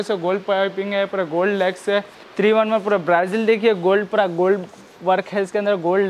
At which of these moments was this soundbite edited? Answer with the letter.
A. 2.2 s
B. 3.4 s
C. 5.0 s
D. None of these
A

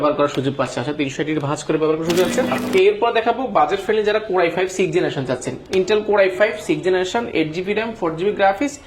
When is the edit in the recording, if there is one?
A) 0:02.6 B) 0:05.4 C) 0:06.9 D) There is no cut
A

